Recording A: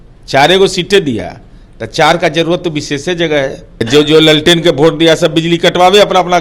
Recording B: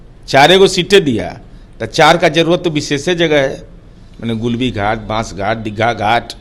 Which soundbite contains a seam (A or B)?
A